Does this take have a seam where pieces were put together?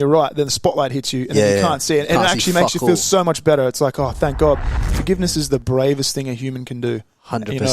yes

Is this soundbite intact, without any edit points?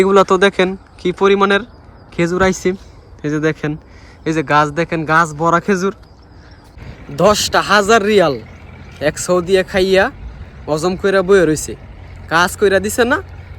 no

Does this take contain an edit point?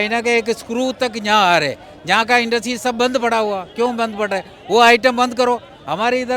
no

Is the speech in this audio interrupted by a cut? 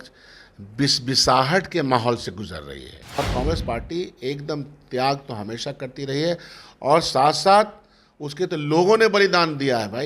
yes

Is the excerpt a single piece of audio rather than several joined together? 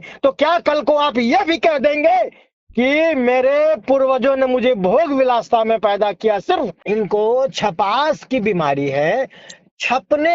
no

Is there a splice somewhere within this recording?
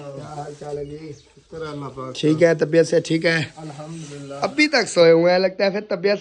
no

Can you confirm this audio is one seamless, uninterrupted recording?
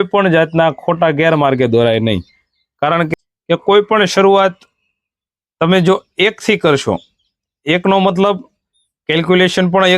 no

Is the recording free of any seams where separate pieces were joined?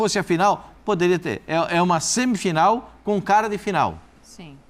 yes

